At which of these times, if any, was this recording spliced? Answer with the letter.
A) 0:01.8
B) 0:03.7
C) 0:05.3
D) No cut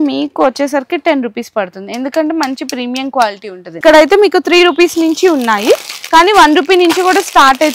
B